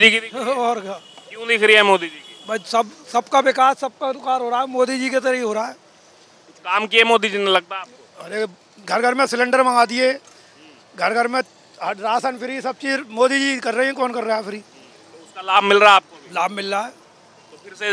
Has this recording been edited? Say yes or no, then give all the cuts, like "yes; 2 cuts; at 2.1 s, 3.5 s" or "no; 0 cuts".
no; 0 cuts